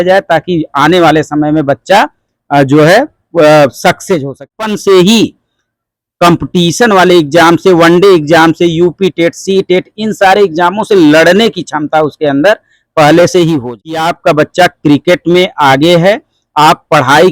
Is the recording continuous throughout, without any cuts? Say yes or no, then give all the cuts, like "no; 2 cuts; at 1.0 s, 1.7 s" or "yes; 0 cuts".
no; 2 cuts; at 4.4 s, 14.1 s